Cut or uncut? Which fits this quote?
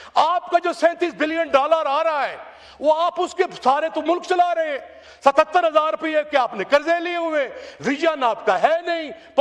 uncut